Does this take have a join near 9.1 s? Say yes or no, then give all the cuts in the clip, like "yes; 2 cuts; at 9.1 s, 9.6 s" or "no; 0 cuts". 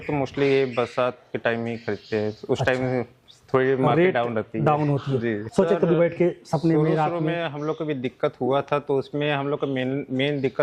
no; 1 cut; at 5.4 s